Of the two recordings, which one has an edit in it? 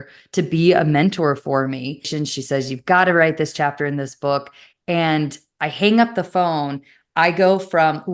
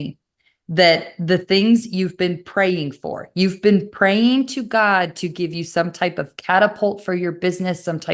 first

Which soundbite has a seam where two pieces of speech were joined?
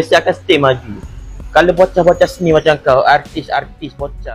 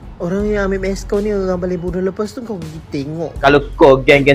second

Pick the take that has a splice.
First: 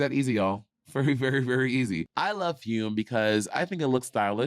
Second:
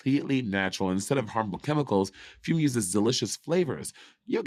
first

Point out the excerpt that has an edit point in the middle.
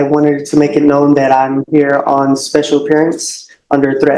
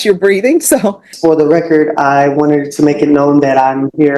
second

